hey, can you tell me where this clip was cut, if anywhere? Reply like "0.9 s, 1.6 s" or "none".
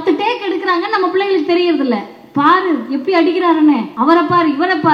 3.9 s

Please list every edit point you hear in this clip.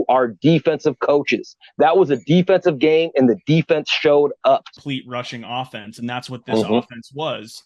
4.7 s

